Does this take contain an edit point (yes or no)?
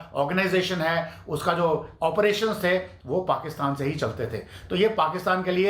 no